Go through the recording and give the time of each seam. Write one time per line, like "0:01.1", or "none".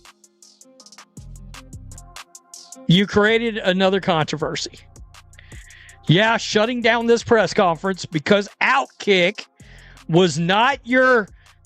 0:02.9